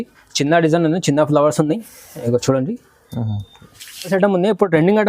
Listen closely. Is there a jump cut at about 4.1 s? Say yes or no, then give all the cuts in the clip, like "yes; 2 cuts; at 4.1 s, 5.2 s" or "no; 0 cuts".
yes; 1 cut; at 4.1 s